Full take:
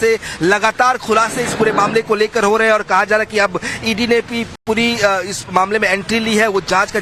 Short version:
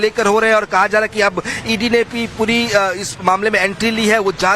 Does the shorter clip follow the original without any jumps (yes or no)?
no